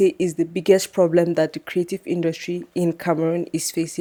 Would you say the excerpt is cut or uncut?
uncut